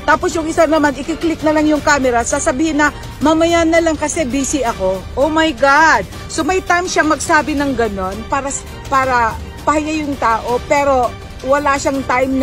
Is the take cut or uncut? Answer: uncut